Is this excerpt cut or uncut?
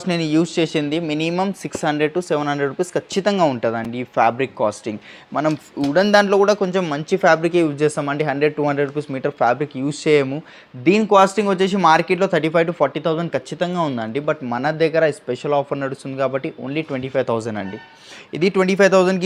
uncut